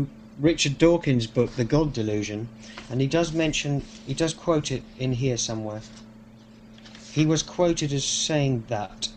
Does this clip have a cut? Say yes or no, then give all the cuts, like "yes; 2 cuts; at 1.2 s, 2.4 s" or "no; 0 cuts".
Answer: no; 0 cuts